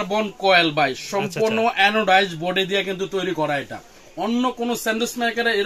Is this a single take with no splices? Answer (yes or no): yes